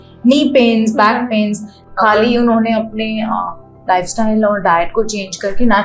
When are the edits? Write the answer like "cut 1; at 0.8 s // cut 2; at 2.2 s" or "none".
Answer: cut 1; at 1.7 s